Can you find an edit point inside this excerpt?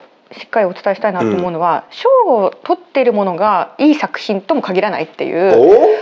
no; 0 cuts

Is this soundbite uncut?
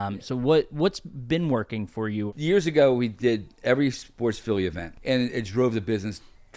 no; 2 cuts; at 2.3 s, 4.9 s

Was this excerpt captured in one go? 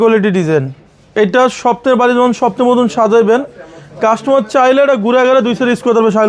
yes; 0 cuts

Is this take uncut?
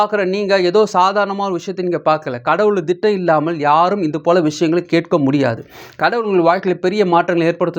yes; 0 cuts

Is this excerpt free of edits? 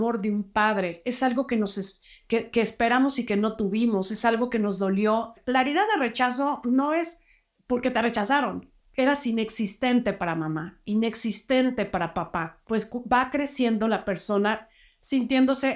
no; 3 cuts; at 5.4 s, 8.7 s, 12.6 s

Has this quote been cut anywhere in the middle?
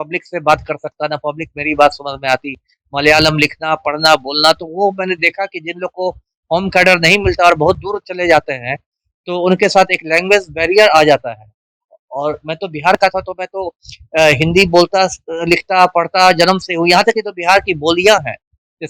no; 0 cuts

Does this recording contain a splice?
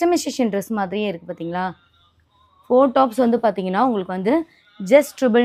no; 0 cuts

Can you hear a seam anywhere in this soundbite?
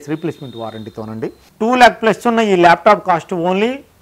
yes; 1 cut; at 1.4 s

